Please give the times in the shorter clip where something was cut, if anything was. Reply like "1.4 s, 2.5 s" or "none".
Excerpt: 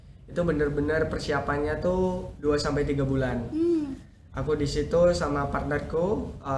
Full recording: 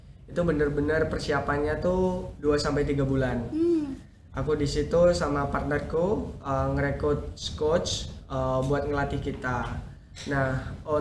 none